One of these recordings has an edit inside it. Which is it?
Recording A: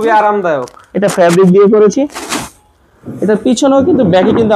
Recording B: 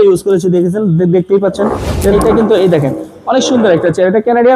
B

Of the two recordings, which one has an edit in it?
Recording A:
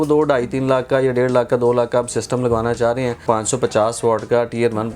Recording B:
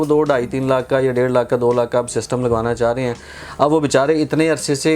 A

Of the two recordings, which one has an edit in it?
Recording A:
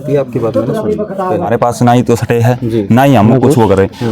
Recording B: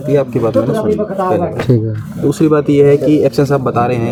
A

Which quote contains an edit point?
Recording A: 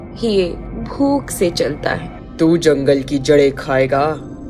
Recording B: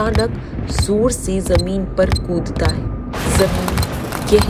A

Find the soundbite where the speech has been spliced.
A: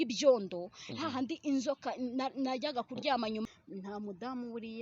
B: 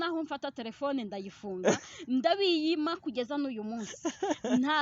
A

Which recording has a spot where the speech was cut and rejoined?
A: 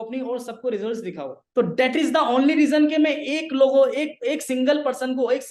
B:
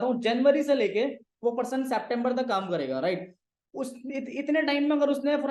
A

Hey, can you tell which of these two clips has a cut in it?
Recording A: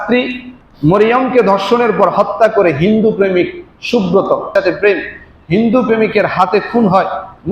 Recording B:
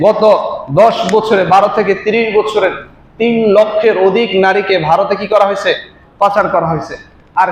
A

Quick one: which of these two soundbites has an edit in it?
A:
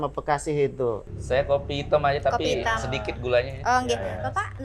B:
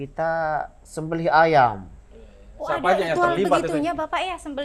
A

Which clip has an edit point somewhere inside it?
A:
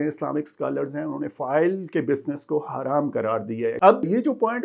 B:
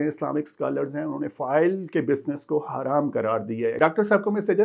B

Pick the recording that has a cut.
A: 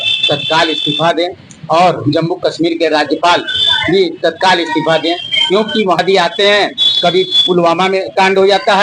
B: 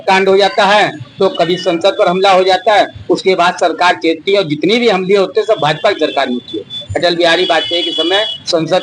A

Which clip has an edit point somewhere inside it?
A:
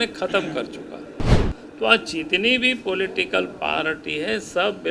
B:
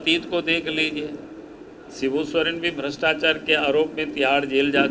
A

